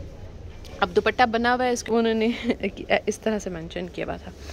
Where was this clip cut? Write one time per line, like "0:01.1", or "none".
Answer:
0:01.9